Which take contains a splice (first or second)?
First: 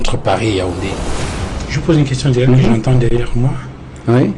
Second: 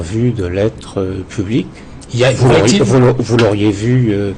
first